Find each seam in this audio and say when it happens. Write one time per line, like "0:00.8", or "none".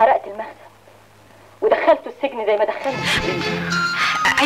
0:03.1